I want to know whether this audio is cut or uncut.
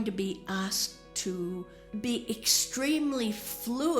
cut